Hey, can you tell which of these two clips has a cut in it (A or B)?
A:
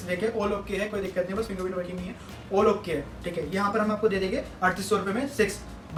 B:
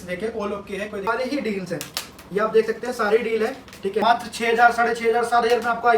B